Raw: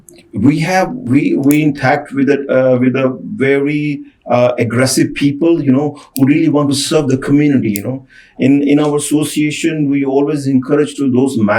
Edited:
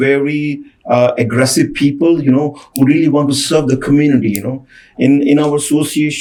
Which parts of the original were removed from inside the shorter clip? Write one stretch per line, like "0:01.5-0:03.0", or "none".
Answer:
none

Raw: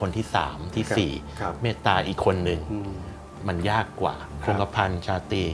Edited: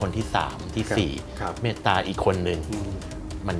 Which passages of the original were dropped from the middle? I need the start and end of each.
none

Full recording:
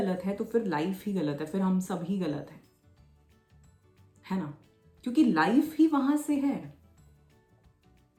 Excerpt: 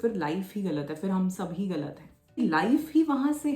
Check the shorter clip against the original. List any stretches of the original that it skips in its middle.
0:02.9-0:05.2

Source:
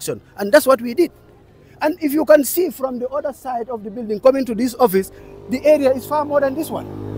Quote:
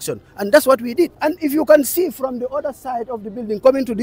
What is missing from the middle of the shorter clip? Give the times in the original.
0:01.1-0:01.8

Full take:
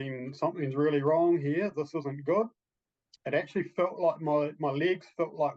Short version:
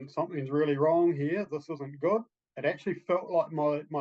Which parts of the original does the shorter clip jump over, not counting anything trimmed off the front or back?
0:02.7-0:03.1

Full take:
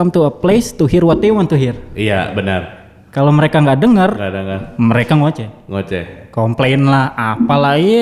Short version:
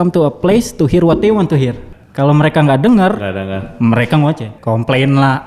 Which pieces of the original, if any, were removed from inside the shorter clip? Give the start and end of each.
0:01.9-0:02.8
0:05.5-0:06.2

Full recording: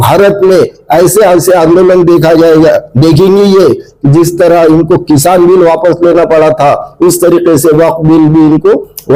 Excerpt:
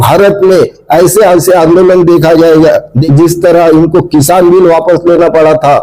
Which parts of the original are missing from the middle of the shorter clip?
0:02.9-0:03.9

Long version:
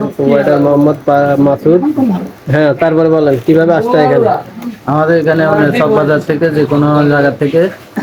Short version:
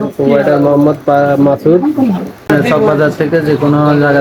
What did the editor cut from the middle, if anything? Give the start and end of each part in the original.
0:02.5-0:05.6

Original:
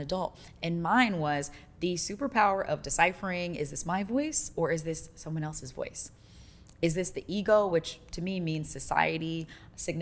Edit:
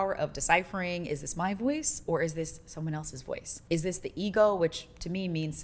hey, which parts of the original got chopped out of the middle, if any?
0:06.0-0:06.6

